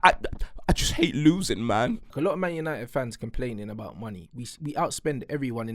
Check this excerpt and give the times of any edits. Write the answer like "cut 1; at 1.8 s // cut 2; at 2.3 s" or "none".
cut 1; at 2.1 s